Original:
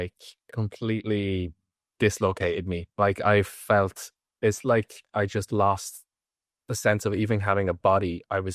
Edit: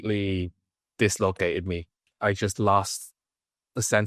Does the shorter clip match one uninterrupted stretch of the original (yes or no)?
no